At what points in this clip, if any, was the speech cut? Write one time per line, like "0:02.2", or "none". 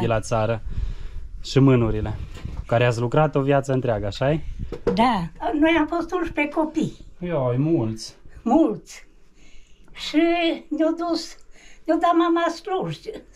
0:05.4